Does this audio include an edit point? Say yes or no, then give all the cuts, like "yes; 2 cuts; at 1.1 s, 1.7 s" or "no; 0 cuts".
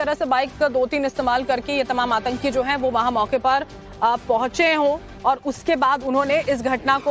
yes; 1 cut; at 4.5 s